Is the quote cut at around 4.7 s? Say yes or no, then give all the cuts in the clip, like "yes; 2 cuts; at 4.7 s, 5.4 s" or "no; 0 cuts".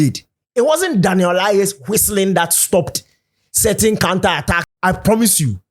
yes; 1 cut; at 4.7 s